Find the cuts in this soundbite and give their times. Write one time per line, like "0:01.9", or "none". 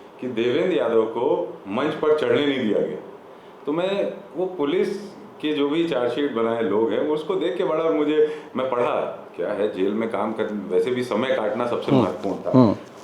none

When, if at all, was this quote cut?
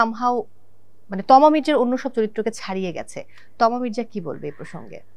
none

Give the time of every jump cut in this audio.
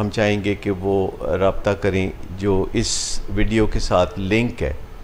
none

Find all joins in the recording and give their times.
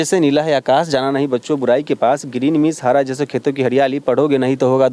none

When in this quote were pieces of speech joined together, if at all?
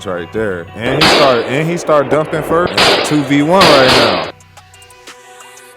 0:02.7

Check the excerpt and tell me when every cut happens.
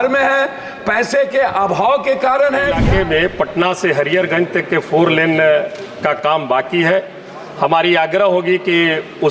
0:02.8

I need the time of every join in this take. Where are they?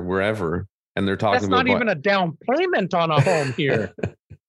none

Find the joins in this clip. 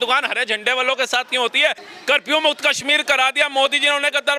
0:01.8

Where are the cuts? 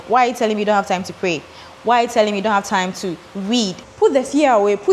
0:03.8

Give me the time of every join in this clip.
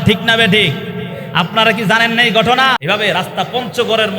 0:02.8

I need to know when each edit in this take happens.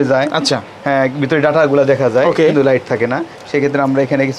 none

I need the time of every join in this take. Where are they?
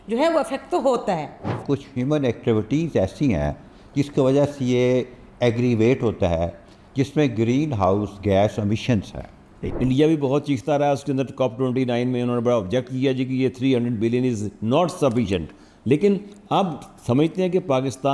0:01.6
0:09.7

